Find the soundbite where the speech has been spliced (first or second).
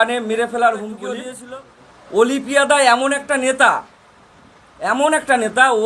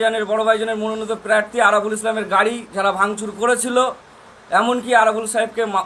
first